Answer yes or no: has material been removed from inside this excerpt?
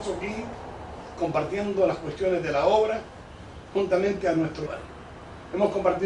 no